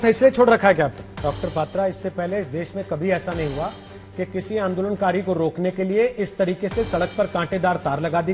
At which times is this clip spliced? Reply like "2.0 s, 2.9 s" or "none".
1.2 s